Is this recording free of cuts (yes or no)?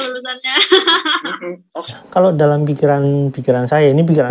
no